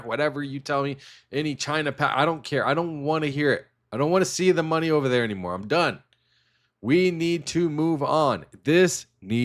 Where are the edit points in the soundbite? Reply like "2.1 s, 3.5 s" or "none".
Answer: none